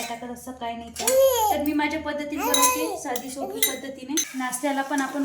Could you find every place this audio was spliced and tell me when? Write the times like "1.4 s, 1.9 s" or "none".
4.3 s